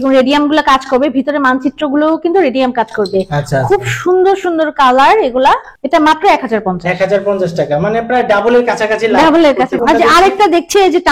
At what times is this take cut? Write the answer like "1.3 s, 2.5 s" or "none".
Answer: 5.7 s, 9.8 s